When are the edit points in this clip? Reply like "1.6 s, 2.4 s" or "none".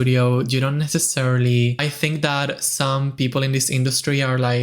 1.8 s